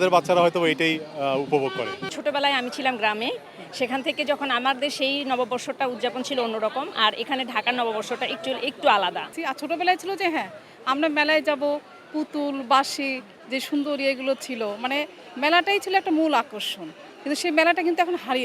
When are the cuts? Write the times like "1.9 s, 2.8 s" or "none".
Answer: 2.1 s, 9.3 s